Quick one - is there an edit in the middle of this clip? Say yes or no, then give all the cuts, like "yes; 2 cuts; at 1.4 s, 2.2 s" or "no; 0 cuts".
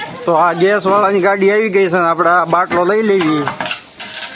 no; 0 cuts